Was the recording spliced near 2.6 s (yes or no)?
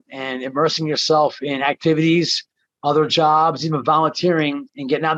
no